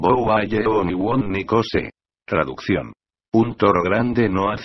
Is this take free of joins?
no; 1 cut; at 1.7 s

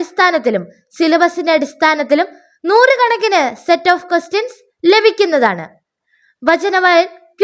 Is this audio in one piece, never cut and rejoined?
no; 1 cut; at 4.0 s

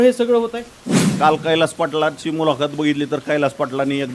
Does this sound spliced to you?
yes; 1 cut; at 1.1 s

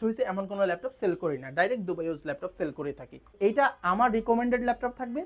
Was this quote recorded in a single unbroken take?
no; 1 cut; at 3.3 s

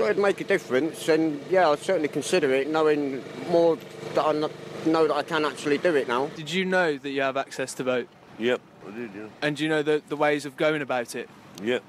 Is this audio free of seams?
yes; 0 cuts

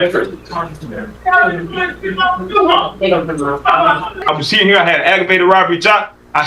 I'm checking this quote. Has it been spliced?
yes; 1 cut; at 4.1 s

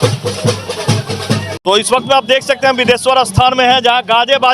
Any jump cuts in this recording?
yes; 1 cut; at 1.6 s

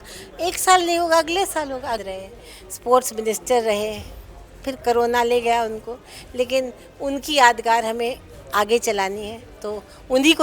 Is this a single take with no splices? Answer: no; 1 cut; at 2.0 s

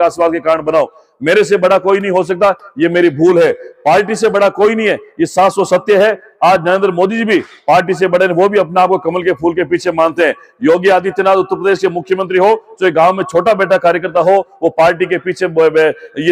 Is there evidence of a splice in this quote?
no; 0 cuts

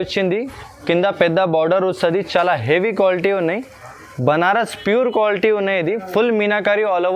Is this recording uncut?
yes; 0 cuts

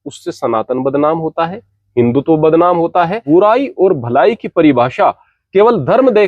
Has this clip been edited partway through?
yes; 1 cut; at 3.2 s

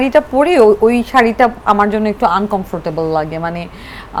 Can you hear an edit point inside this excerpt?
no; 0 cuts

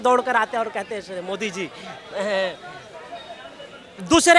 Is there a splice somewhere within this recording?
no; 0 cuts

